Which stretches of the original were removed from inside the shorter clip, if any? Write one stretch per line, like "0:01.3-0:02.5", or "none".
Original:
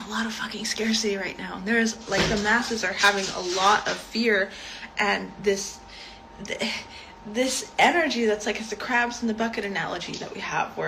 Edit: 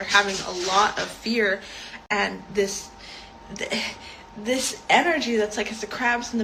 none

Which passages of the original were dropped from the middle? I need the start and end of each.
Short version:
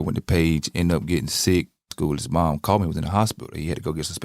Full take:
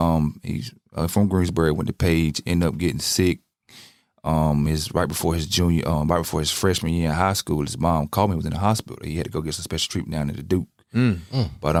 0:03.6-0:07.4

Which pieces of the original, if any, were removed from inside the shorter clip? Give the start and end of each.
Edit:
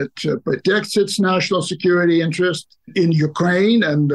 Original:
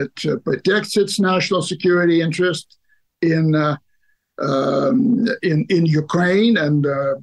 0:02.9-0:05.6

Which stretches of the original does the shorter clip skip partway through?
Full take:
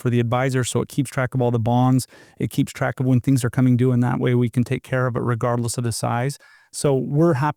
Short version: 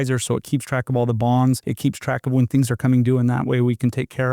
0:02.1-0:02.4

